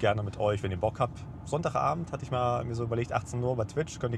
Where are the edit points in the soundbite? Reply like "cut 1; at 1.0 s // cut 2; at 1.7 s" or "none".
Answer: none